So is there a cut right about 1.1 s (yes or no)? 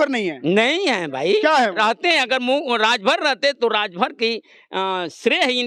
no